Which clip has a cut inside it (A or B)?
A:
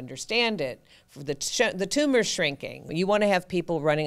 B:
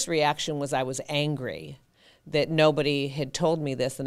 A